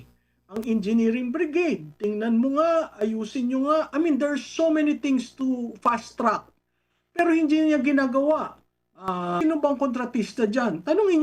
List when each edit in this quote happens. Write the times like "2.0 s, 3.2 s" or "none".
9.4 s